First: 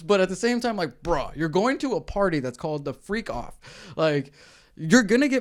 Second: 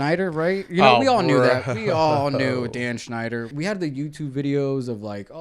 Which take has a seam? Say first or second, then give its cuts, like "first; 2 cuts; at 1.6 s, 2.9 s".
second; 1 cut; at 3.5 s